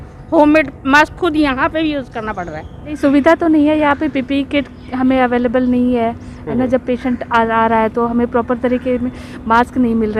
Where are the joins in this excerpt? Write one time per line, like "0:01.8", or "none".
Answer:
0:03.0